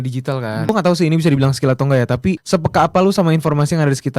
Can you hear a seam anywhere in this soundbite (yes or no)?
yes